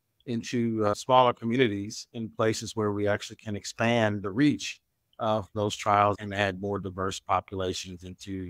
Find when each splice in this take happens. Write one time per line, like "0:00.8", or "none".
0:00.9
0:06.2